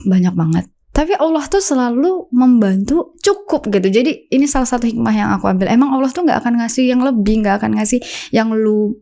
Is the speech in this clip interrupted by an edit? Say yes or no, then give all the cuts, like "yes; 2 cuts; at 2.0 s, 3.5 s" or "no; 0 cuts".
no; 0 cuts